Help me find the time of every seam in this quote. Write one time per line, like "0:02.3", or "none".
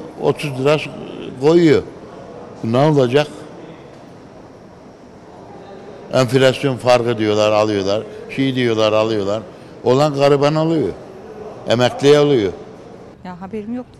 none